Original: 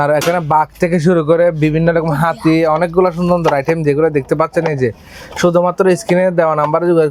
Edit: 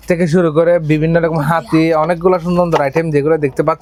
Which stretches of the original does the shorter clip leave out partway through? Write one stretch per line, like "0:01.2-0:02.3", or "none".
none